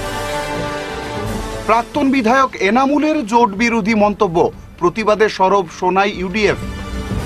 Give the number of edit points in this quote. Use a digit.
1